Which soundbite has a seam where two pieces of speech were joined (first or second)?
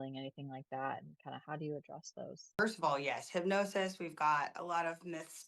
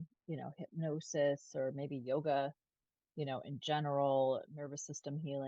first